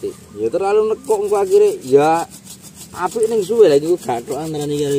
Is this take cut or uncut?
uncut